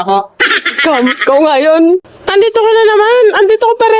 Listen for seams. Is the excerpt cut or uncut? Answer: cut